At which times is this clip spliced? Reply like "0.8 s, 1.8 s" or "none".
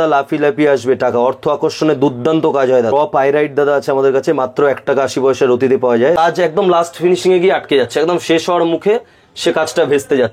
2.9 s, 6.2 s